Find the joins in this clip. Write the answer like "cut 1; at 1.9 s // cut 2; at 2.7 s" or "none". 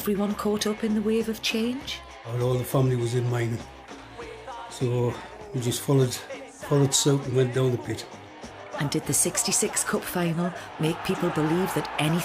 cut 1; at 4.7 s